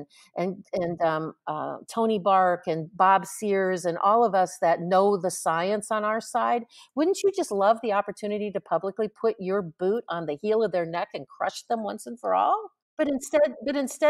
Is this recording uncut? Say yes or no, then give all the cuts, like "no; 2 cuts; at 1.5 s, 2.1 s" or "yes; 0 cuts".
no; 1 cut; at 12.8 s